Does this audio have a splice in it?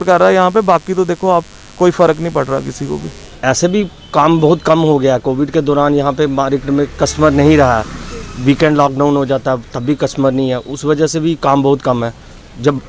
yes; 1 cut; at 3.1 s

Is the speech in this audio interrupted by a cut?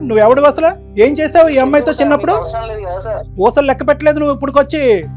yes; 1 cut; at 3.3 s

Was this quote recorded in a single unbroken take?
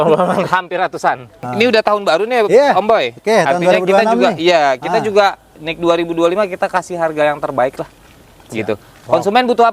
no; 1 cut; at 1.4 s

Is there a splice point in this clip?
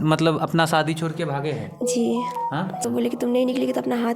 yes; 1 cut; at 2.8 s

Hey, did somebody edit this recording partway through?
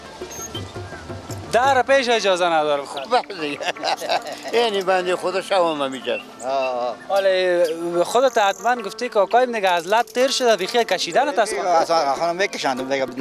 no; 0 cuts

